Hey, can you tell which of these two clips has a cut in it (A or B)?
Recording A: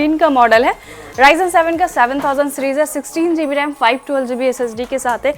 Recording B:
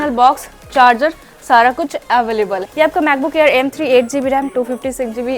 B